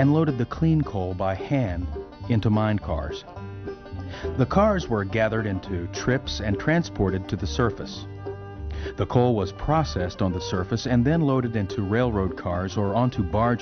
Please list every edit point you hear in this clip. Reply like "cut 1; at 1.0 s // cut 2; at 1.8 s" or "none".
cut 1; at 9.7 s